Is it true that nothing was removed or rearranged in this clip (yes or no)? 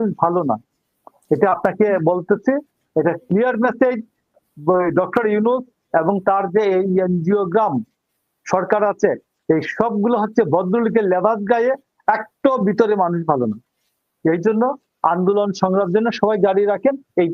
yes